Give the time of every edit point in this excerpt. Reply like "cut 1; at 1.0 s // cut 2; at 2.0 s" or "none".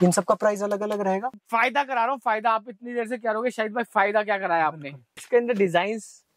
cut 1; at 1.4 s // cut 2; at 5.2 s